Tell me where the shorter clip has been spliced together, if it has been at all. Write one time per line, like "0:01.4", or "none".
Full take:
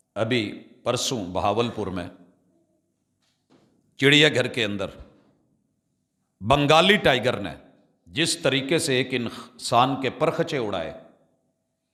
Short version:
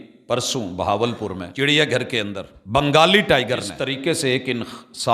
0:01.5
0:02.5
0:03.8